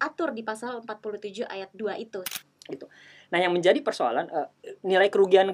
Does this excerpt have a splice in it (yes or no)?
yes